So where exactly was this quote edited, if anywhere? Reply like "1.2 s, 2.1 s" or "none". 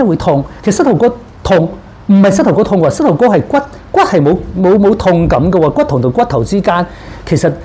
none